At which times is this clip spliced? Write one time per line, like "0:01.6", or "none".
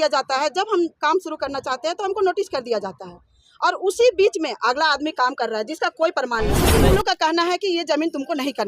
0:06.7